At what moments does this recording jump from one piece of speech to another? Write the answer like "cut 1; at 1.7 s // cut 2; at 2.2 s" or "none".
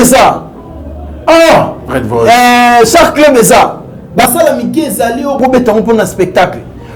none